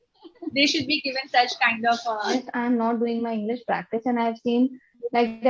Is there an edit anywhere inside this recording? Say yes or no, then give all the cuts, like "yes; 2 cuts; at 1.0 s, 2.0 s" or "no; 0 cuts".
yes; 1 cut; at 2.3 s